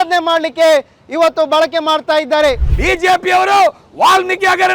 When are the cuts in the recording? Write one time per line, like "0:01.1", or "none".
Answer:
0:02.7